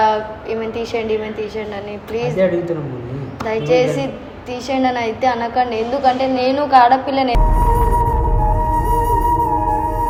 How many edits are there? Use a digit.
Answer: 0